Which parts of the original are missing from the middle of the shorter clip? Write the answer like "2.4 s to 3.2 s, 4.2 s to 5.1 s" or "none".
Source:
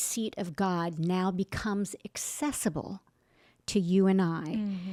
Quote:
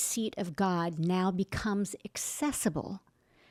none

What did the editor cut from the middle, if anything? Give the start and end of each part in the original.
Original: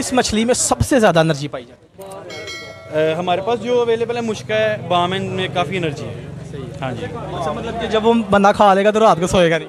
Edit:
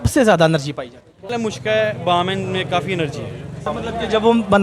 2.1 s to 4.1 s, 6.5 s to 7.5 s

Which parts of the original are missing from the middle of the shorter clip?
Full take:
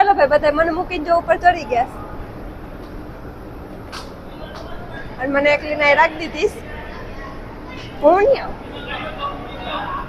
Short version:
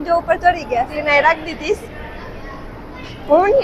1.9 s to 5.6 s

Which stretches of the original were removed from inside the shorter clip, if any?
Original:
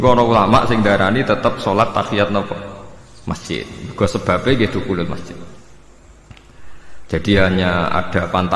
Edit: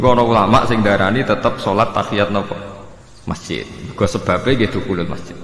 none

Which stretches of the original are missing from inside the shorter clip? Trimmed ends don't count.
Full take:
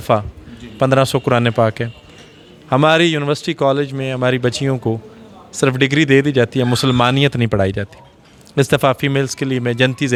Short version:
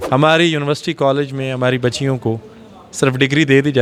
none

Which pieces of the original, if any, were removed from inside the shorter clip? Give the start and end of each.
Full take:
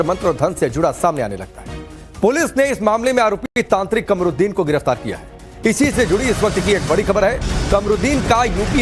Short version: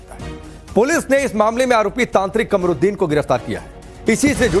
3.4 s to 3.5 s

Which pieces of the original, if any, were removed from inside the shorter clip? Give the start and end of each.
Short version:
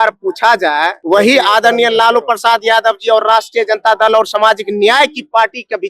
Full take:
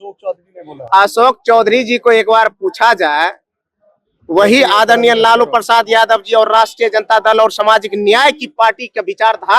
3.4 s to 4.2 s

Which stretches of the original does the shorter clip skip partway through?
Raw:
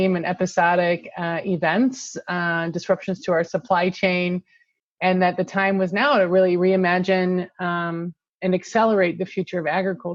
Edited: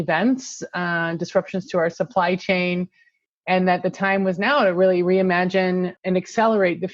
7.5 s to 8.3 s

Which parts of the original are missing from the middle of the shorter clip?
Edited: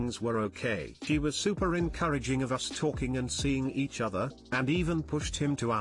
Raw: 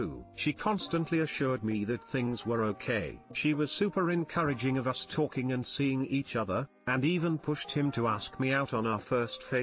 3.2 s to 3.3 s

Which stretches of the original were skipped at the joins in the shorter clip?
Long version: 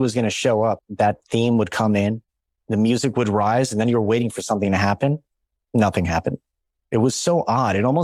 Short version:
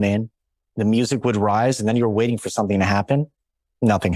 none

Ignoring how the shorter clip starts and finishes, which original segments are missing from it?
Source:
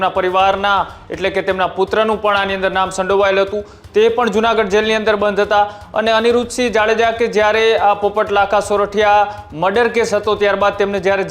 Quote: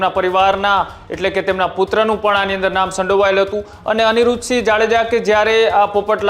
3.8 s to 5.8 s

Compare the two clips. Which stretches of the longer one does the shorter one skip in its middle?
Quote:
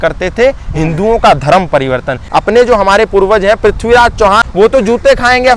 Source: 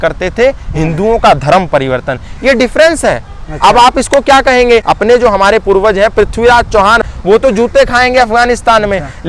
2.3 s to 4.8 s, 7.0 s to 7.2 s

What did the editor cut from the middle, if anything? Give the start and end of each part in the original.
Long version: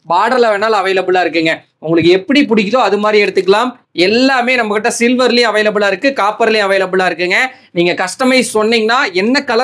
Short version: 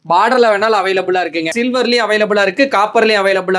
1.5 s to 5.0 s

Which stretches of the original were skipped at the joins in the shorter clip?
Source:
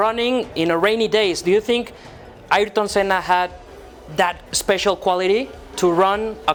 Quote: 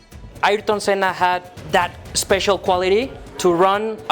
4.1 s to 4.4 s

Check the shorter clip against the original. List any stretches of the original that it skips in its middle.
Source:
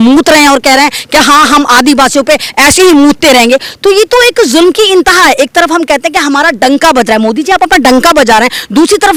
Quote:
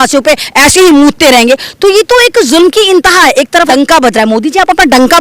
5.7 s to 6.6 s

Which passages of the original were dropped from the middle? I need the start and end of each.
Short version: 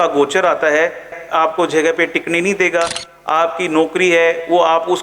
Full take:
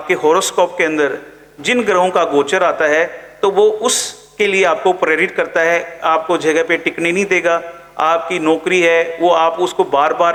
3.3 s to 5.9 s

